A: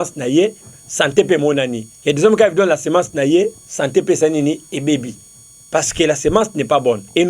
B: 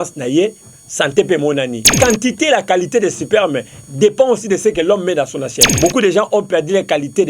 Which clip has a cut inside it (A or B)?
B